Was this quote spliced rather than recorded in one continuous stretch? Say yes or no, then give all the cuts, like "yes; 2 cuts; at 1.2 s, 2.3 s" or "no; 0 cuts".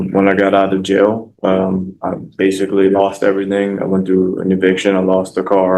no; 0 cuts